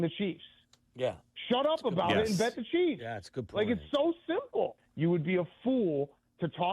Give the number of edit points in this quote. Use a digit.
1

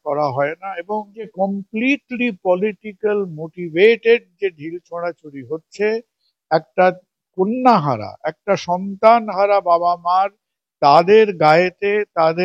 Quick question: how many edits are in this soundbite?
1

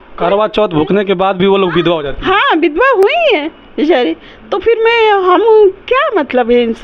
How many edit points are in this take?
0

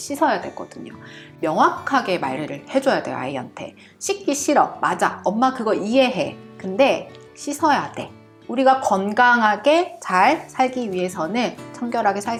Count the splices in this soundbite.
0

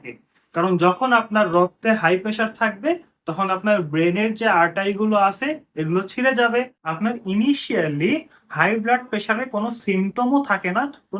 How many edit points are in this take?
1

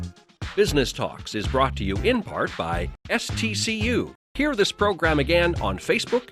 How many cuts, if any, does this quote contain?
2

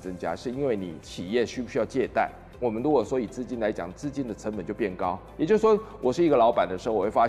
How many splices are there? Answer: 0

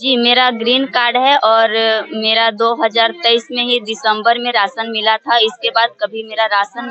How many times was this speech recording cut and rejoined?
0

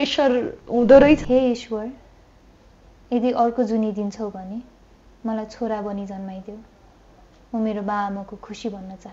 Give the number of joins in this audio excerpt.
1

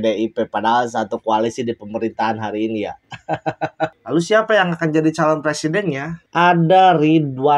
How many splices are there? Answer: 1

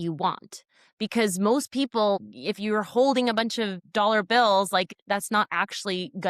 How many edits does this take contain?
3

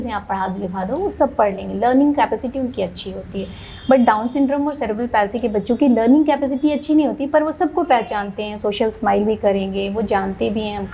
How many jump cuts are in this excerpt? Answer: 0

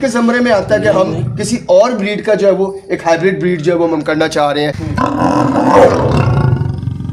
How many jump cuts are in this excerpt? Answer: 1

